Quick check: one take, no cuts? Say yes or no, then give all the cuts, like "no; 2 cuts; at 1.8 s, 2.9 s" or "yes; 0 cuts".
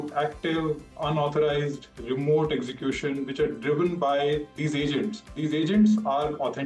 no; 1 cut; at 4.9 s